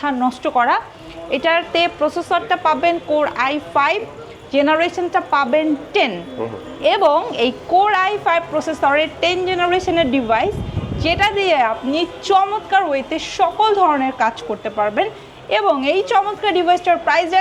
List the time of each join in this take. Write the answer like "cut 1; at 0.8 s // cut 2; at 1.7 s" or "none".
none